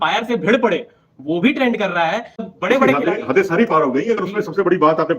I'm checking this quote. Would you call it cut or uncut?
cut